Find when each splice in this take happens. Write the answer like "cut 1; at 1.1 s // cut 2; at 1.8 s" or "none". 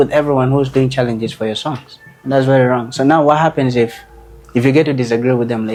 none